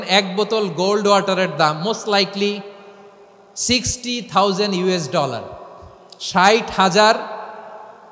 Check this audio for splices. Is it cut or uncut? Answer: uncut